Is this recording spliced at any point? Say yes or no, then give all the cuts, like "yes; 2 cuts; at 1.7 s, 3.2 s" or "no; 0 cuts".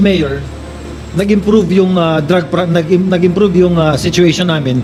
no; 0 cuts